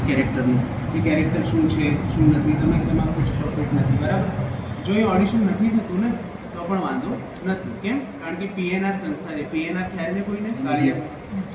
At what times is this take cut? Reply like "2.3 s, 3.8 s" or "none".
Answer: none